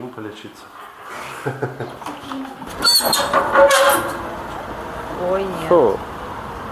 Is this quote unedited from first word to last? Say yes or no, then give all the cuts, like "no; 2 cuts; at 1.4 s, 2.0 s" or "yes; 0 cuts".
no; 1 cut; at 2.7 s